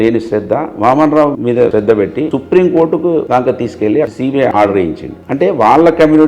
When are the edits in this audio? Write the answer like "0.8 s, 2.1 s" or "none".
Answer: 1.8 s, 3.3 s, 4.3 s

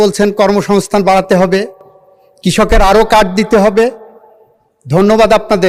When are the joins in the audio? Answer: none

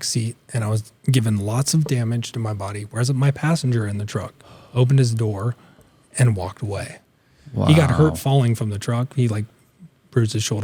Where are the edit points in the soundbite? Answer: none

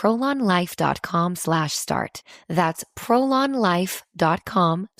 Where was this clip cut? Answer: 2.2 s

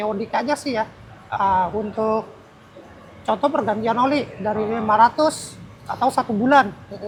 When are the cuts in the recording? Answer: none

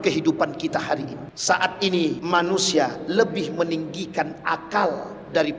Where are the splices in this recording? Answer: 1.3 s, 2.2 s

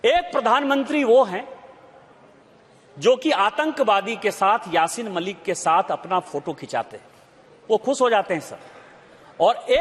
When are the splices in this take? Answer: none

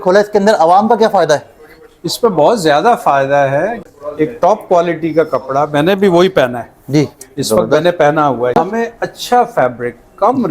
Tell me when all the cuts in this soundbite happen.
3.8 s, 8.5 s

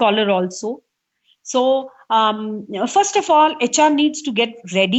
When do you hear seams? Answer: none

